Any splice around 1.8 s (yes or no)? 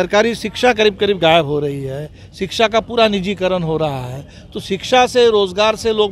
no